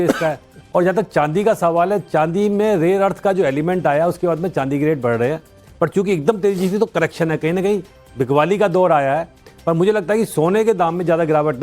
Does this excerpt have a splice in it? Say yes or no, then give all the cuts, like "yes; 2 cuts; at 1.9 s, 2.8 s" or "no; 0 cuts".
yes; 1 cut; at 9.9 s